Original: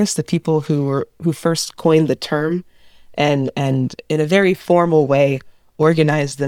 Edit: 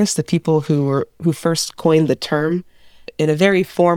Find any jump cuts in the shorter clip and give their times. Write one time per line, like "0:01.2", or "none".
0:03.0